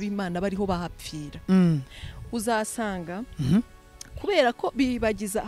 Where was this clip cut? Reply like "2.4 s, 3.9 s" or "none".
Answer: none